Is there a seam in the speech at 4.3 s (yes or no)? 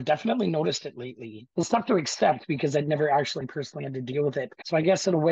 no